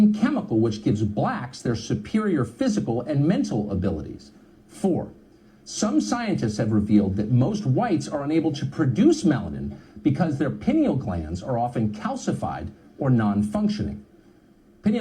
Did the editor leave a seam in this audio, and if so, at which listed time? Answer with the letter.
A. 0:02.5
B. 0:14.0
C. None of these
B